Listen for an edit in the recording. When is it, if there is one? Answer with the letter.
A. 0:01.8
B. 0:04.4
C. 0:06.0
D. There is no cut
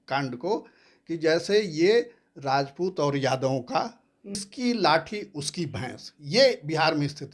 B